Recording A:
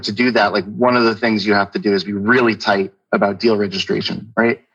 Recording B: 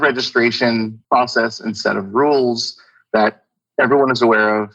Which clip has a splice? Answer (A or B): B